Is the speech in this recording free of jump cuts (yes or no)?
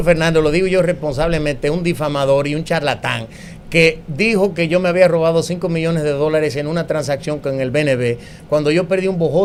yes